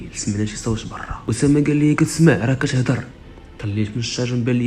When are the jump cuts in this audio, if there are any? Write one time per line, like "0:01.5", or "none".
0:01.2

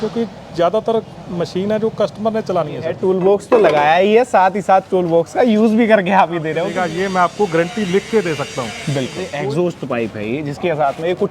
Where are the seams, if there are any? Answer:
0:02.9
0:06.6
0:08.8

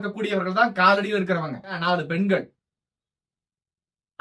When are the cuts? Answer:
0:01.8

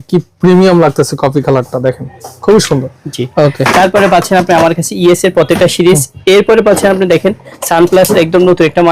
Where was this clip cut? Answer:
none

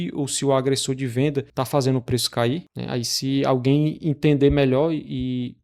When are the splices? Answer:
0:01.5
0:02.7

